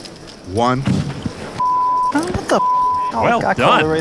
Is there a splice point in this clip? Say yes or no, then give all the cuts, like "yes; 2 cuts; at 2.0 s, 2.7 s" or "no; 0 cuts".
no; 0 cuts